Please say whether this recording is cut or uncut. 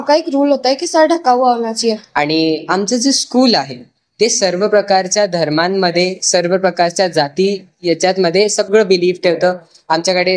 cut